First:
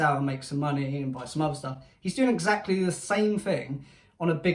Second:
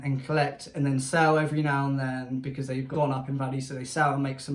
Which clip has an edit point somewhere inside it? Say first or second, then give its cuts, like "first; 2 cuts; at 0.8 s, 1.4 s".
second; 1 cut; at 2.9 s